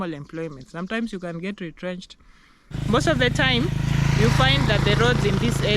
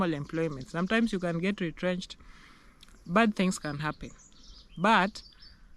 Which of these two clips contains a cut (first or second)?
first